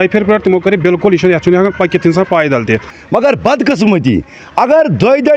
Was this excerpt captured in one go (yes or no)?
no